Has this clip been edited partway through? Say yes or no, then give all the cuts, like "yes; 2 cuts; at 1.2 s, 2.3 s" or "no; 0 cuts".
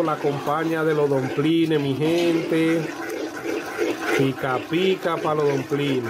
no; 0 cuts